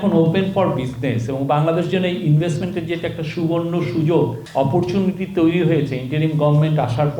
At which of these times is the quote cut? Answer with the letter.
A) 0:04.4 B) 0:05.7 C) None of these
A